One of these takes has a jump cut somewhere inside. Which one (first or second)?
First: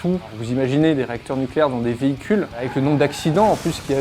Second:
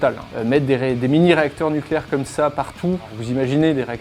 first